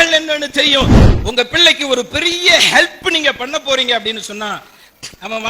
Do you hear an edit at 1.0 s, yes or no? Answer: yes